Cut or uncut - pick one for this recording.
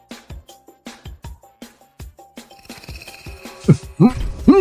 cut